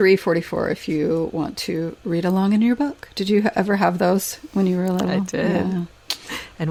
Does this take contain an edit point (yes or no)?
no